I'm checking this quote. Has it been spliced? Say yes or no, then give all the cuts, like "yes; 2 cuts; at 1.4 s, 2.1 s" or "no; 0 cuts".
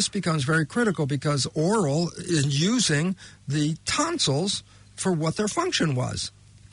no; 0 cuts